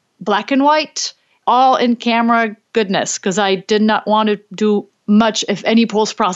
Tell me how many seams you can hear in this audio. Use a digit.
1